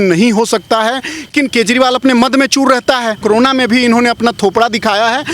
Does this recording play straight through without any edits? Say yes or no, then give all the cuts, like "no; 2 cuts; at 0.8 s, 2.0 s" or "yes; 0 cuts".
no; 2 cuts; at 1.3 s, 3.2 s